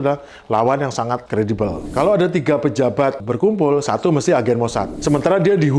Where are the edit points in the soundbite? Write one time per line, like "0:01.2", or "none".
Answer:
0:01.6
0:03.3
0:04.9

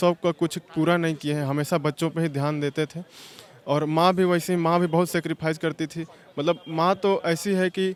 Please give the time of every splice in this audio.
none

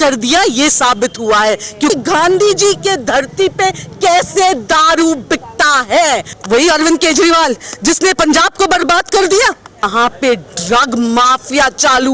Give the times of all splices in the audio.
0:01.9
0:06.3
0:09.8

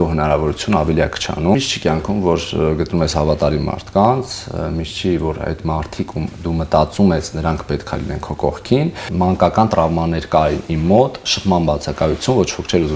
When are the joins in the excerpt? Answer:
0:01.6
0:09.0

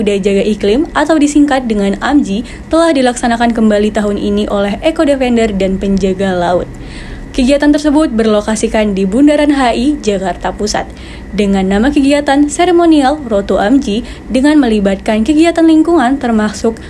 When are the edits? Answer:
none

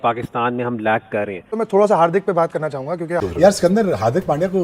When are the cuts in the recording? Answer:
0:01.4
0:03.2

